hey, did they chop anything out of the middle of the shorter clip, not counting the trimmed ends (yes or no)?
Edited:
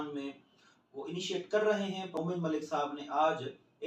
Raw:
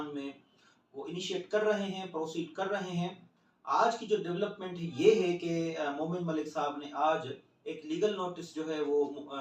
yes